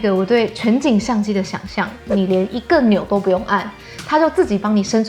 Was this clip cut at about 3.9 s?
no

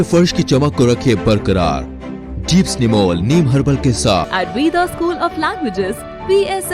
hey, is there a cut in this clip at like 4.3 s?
yes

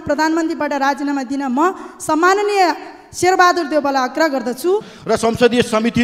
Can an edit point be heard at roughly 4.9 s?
yes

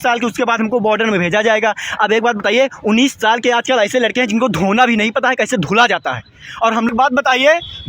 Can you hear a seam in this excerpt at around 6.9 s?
yes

